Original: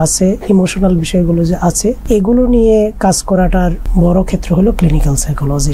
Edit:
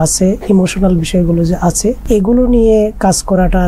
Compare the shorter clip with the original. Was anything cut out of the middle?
no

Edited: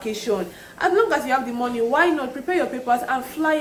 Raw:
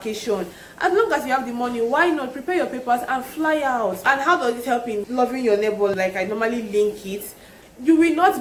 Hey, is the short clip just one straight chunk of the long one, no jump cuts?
yes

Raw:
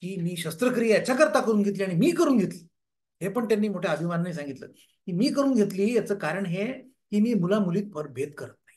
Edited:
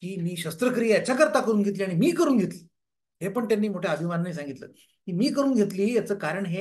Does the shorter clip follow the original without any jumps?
yes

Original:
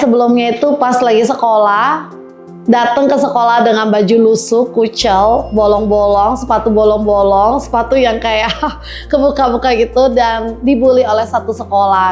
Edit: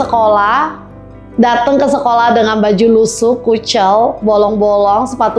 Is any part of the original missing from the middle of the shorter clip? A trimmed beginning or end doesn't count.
no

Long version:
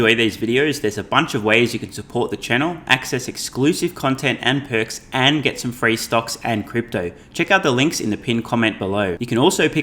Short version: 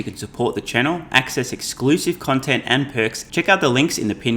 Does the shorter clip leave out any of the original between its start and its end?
yes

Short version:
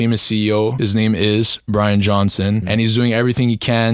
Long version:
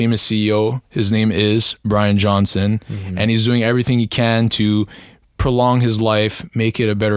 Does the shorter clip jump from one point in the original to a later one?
yes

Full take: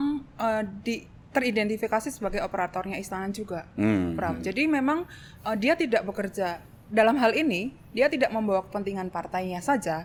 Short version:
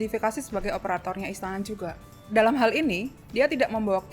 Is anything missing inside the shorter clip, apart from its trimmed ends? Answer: yes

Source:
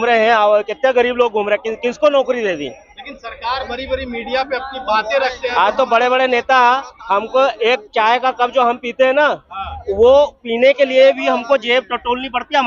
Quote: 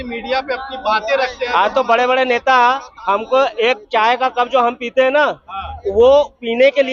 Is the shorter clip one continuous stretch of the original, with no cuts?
yes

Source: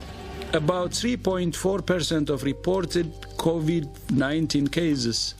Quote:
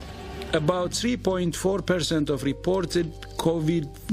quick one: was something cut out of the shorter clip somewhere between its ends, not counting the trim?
no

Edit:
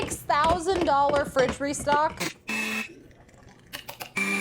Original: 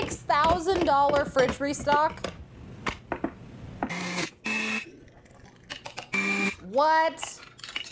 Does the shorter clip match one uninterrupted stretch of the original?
no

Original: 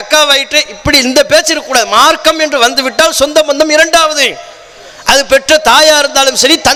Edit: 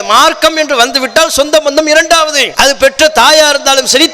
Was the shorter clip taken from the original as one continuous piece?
no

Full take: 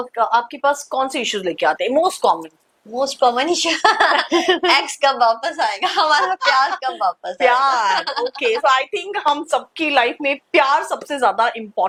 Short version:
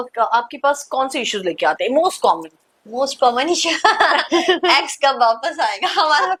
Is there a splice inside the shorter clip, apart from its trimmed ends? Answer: no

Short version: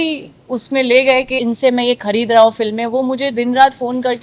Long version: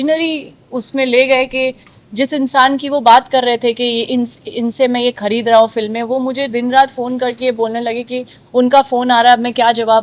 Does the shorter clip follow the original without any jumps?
no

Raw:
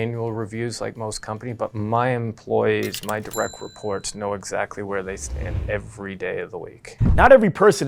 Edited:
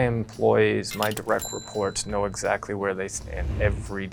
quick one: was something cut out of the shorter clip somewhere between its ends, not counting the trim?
no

